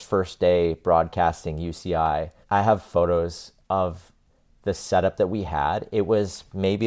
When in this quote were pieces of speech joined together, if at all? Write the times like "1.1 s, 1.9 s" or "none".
2.4 s